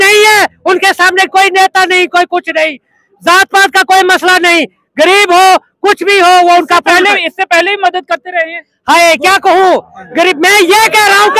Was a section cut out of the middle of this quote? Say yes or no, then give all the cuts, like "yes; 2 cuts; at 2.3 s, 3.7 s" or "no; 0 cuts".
no; 0 cuts